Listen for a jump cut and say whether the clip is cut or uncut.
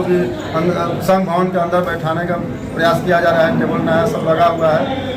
uncut